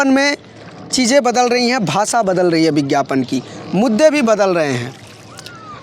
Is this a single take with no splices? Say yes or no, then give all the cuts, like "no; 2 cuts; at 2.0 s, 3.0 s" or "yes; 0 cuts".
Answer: yes; 0 cuts